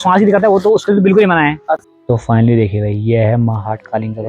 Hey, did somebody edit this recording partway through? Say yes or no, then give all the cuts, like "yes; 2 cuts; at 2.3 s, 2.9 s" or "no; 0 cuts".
yes; 1 cut; at 1.6 s